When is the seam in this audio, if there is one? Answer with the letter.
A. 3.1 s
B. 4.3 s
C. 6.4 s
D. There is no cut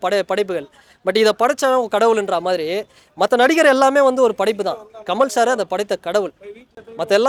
D